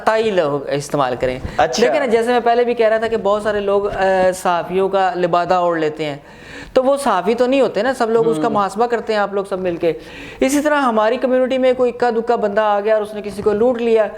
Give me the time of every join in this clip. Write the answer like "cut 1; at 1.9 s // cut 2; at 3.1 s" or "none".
none